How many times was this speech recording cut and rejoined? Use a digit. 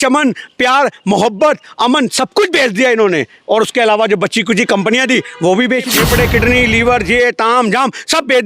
1